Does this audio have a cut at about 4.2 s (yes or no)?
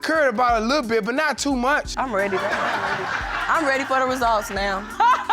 no